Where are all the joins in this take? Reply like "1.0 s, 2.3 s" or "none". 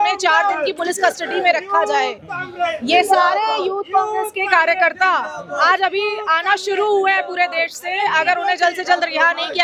none